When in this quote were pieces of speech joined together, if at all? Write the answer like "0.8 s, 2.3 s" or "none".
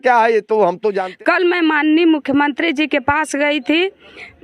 1.1 s